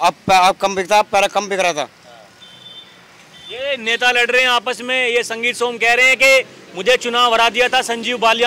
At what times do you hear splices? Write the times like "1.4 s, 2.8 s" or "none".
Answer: none